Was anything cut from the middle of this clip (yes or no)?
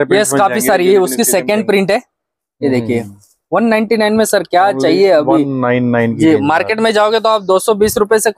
no